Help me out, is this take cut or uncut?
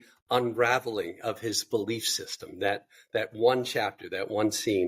uncut